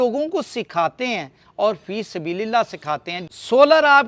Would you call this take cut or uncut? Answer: cut